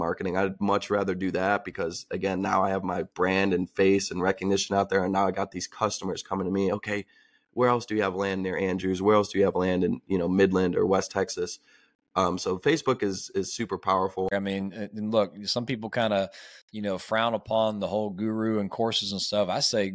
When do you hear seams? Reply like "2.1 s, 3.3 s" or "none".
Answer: 14.3 s